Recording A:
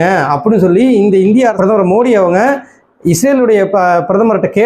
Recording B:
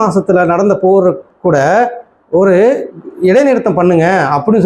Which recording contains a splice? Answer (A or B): A